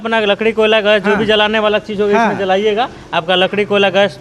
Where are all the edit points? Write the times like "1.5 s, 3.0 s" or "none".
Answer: none